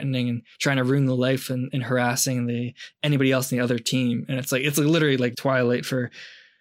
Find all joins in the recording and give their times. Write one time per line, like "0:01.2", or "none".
0:05.4